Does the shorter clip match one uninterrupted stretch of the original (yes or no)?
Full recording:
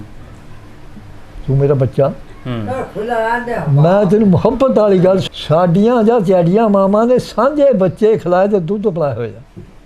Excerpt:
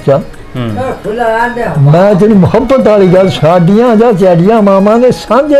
no